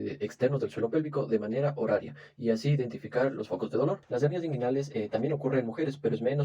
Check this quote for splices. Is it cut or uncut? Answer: cut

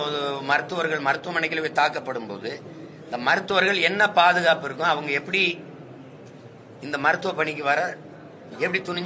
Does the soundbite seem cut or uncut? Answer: uncut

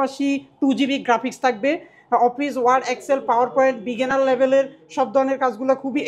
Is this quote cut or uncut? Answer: uncut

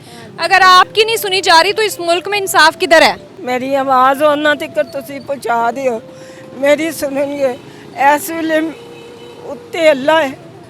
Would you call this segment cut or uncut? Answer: cut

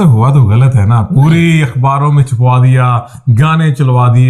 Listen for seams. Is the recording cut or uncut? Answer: uncut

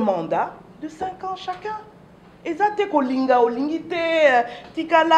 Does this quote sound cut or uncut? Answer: uncut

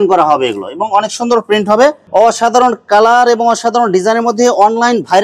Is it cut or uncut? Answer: cut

